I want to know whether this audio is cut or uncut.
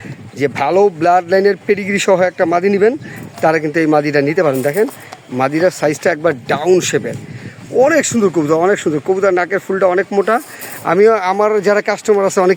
uncut